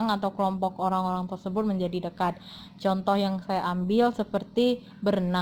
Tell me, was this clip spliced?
no; 0 cuts

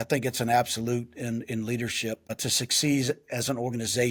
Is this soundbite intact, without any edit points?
yes; 0 cuts

